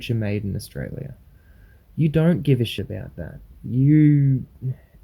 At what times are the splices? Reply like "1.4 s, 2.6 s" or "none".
2.8 s